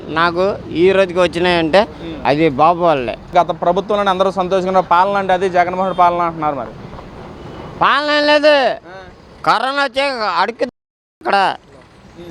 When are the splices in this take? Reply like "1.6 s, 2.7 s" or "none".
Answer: 2.1 s, 3.3 s